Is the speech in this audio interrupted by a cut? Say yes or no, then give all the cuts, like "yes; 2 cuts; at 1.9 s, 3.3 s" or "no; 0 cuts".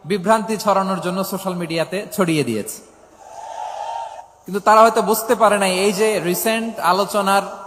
yes; 1 cut; at 4.3 s